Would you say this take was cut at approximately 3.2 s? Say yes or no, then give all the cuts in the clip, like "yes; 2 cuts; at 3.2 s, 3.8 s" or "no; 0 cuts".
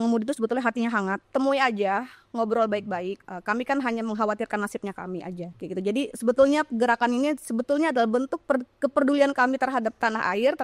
yes; 3 cuts; at 1.2 s, 3.2 s, 5.5 s